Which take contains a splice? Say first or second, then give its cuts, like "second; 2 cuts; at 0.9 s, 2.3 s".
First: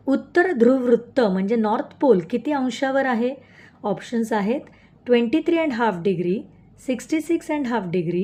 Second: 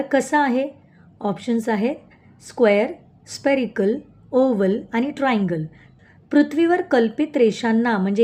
second; 1 cut; at 5.8 s